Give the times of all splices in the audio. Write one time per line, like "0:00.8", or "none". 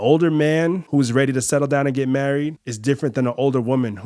0:00.8
0:02.7